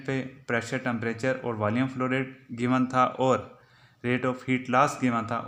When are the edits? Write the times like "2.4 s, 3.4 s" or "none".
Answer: none